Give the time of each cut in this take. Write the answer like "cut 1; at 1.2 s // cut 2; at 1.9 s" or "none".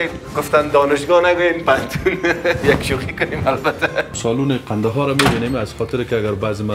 cut 1; at 4.1 s